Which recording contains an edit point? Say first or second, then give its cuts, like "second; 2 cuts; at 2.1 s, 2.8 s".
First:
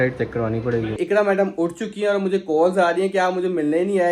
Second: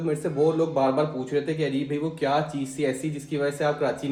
first; 1 cut; at 1.0 s